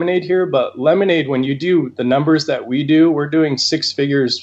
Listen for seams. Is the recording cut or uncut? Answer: uncut